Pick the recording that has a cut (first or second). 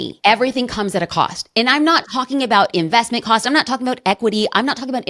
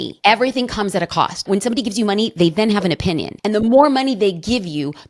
second